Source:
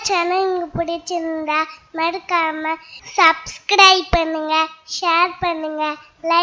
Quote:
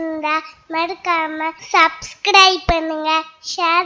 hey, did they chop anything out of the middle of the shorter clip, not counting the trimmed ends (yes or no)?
yes